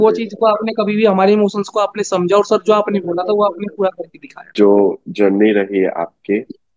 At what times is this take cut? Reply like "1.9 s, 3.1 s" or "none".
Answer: 4.4 s